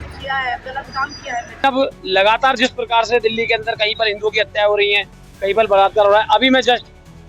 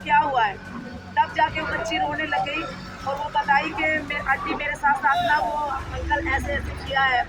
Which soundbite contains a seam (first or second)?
first